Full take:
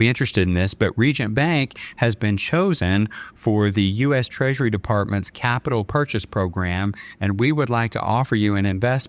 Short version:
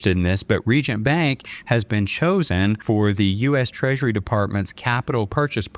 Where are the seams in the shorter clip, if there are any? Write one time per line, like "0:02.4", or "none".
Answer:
0:02.8